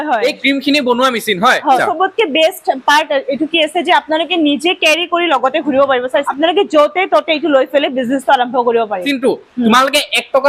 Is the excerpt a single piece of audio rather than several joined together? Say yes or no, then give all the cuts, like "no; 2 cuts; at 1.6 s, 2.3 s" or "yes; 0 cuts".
no; 3 cuts; at 1.8 s, 6.3 s, 9.1 s